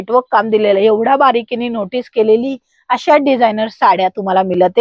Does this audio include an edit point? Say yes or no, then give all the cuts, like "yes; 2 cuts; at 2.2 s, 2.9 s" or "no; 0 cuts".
no; 0 cuts